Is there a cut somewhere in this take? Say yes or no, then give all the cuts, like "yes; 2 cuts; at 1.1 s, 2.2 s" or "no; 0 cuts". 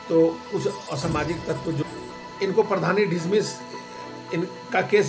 yes; 1 cut; at 1.8 s